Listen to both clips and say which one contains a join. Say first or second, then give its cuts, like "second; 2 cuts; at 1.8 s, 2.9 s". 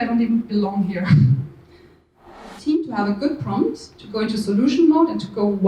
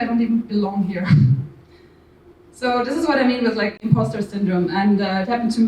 first; 1 cut; at 2.6 s